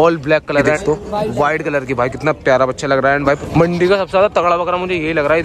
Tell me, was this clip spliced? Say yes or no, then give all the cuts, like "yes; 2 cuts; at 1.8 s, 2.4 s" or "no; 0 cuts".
yes; 2 cuts; at 0.8 s, 3.4 s